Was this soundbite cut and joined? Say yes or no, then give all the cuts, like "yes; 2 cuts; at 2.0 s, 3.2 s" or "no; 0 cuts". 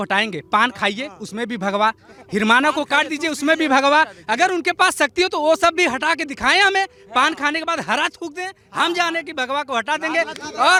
no; 0 cuts